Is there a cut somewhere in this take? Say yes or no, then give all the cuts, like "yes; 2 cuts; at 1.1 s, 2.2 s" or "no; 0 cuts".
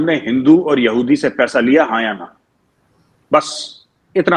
no; 0 cuts